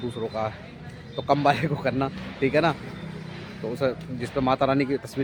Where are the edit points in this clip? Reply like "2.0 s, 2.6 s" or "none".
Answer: none